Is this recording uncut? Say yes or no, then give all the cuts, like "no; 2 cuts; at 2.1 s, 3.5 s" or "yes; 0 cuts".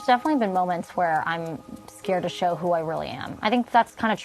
yes; 0 cuts